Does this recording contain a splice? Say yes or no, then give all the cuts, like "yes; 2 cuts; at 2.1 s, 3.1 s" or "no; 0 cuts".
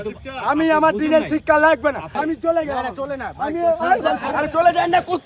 yes; 2 cuts; at 2.1 s, 4.3 s